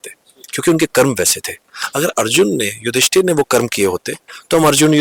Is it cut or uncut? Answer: uncut